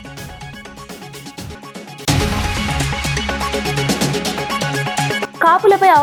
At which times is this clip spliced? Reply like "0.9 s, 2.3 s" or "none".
none